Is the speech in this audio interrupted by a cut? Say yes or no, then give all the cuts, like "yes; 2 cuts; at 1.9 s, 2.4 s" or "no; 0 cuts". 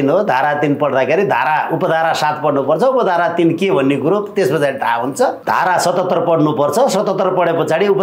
yes; 1 cut; at 5.4 s